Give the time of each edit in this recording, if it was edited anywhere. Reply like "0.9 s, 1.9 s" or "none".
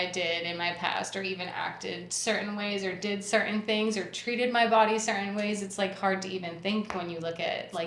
none